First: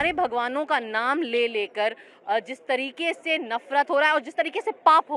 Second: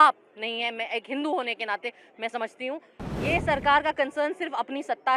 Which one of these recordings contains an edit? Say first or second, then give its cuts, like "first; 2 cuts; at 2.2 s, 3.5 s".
second; 1 cut; at 3.0 s